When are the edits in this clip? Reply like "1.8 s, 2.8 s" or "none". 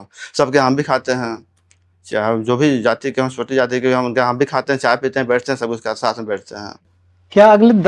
6.9 s